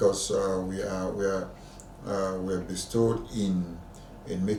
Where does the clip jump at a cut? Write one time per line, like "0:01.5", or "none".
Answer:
none